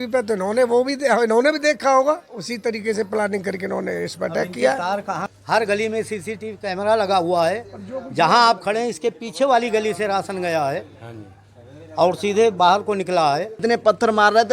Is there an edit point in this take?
yes; 2 cuts; at 5.3 s, 13.6 s

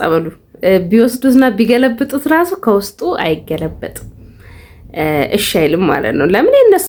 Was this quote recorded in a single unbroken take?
yes; 0 cuts

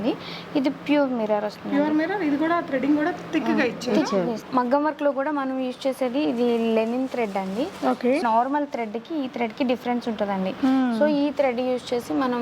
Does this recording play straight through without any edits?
no; 2 cuts; at 4.4 s, 8.2 s

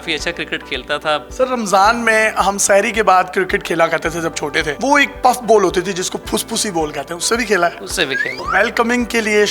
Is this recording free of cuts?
no; 2 cuts; at 1.3 s, 8.4 s

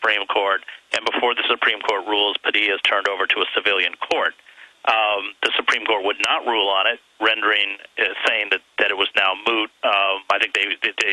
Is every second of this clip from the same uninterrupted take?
no; 1 cut; at 5.2 s

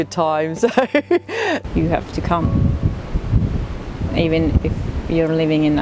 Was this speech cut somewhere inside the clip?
yes; 1 cut; at 1.5 s

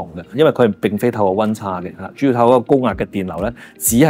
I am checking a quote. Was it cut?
no; 0 cuts

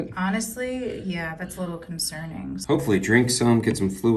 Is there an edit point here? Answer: yes; 1 cut; at 2.6 s

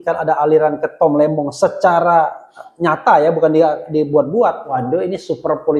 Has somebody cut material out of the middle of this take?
yes; 1 cut; at 4.7 s

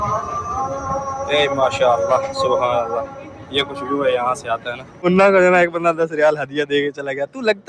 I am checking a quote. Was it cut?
no; 0 cuts

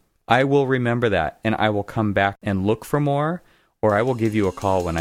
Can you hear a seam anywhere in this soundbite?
yes; 1 cut; at 2.4 s

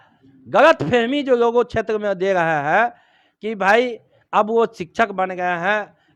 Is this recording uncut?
yes; 0 cuts

